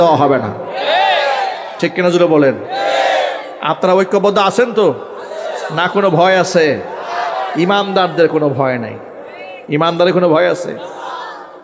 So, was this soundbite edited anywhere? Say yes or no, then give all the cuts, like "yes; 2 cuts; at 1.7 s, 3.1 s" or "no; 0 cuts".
no; 0 cuts